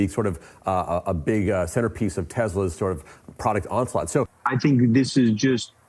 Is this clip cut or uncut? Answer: cut